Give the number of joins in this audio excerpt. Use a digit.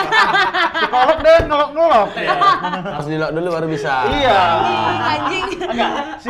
0